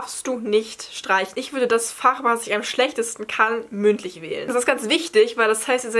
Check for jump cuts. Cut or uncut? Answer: cut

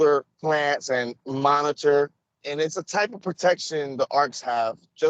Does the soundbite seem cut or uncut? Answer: cut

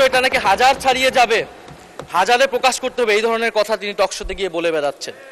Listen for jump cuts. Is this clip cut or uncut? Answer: uncut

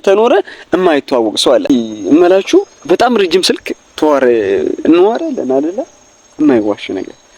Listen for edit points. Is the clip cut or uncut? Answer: cut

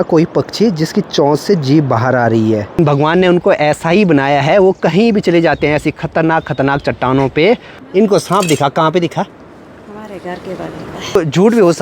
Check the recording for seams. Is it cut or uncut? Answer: cut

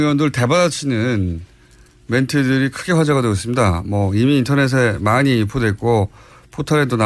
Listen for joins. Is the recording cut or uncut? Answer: cut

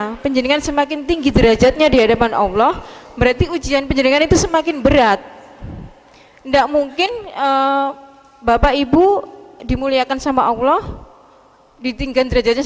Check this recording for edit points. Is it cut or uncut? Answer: uncut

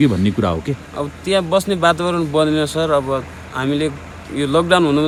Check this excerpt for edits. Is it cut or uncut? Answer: uncut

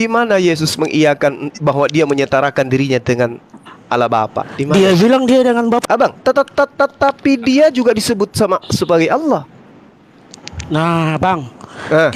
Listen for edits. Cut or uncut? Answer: cut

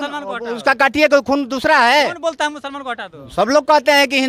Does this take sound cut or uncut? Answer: uncut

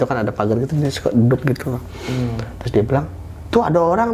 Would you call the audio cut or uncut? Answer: uncut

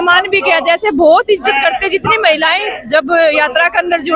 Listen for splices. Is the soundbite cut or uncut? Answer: uncut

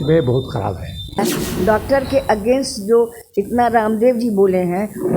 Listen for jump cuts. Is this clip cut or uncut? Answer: cut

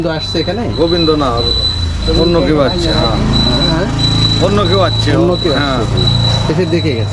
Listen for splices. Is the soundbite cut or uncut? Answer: uncut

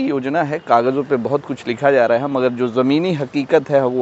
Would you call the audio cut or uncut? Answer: uncut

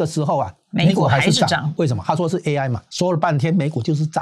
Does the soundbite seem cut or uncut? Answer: cut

